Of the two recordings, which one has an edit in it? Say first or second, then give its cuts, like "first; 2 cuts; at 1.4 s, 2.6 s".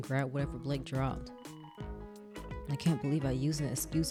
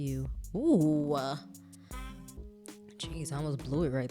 second; 1 cut; at 2.4 s